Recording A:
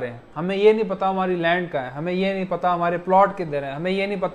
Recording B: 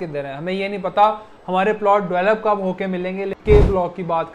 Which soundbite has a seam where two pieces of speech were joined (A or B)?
B